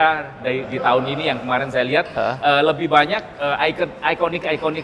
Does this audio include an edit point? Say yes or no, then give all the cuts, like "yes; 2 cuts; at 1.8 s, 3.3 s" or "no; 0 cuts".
no; 0 cuts